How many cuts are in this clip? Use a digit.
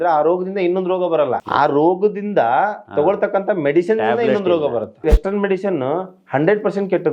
2